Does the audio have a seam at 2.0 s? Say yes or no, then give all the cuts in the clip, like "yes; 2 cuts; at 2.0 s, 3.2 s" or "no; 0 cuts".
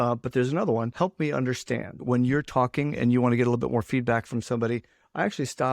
yes; 2 cuts; at 0.9 s, 2.0 s